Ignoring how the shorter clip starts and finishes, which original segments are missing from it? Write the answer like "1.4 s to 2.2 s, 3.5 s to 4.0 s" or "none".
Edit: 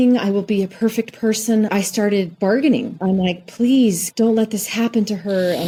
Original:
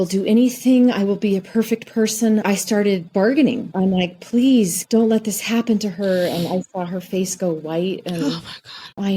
none